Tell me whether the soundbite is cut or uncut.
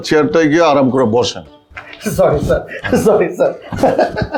uncut